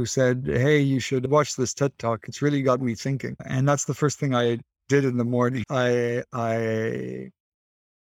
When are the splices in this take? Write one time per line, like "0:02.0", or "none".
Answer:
none